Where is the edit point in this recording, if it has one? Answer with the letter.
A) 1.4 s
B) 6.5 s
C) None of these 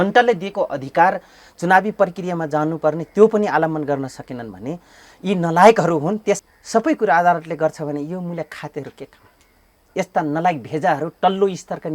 B